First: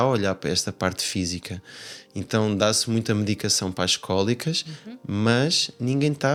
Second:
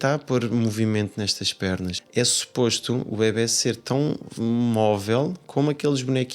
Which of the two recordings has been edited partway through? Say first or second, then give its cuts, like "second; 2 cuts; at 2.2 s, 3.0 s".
second; 1 cut; at 2.0 s